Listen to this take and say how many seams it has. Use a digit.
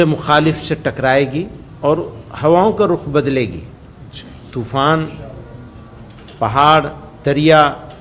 1